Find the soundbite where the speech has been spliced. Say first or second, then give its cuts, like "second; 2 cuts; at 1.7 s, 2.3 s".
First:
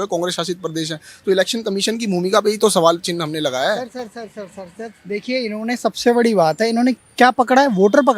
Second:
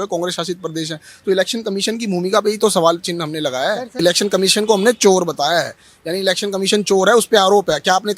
second; 1 cut; at 3.9 s